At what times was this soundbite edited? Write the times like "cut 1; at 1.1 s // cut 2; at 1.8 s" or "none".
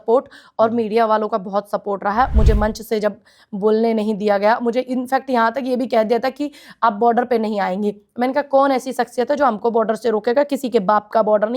cut 1; at 2.3 s